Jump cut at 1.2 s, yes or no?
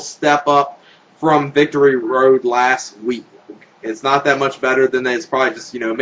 no